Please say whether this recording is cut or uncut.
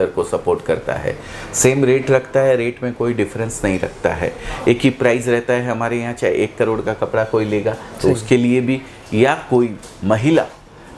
uncut